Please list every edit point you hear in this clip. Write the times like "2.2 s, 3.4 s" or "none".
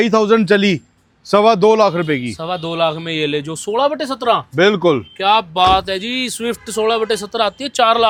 none